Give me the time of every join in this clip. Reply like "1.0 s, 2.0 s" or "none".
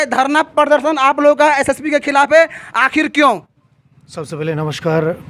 none